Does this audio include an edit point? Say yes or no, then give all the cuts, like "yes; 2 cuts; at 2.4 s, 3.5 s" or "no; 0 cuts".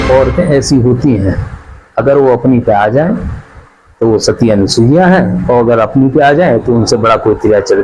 no; 0 cuts